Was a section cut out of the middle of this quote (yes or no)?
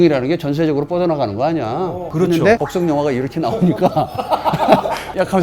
yes